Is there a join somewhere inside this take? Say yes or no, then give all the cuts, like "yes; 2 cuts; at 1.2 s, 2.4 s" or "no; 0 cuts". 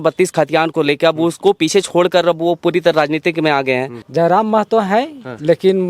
yes; 1 cut; at 4.0 s